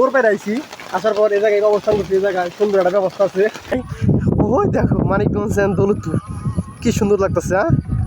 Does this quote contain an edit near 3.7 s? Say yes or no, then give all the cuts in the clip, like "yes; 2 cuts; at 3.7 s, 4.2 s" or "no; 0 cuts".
yes; 1 cut; at 3.7 s